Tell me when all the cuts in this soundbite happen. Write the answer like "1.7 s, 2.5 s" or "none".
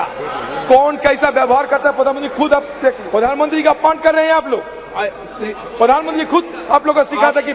3.0 s